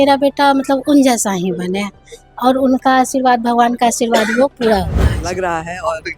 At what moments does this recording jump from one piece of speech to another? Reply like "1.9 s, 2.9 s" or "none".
5.1 s